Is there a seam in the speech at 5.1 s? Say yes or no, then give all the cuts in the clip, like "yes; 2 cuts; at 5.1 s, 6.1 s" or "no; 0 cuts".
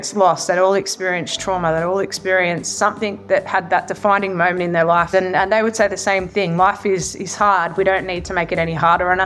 yes; 1 cut; at 5.1 s